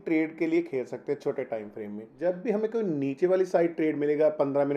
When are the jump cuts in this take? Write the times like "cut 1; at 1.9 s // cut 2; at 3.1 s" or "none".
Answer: cut 1; at 2.1 s